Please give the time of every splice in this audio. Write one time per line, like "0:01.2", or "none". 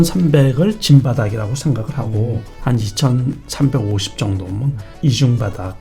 0:02.5
0:04.9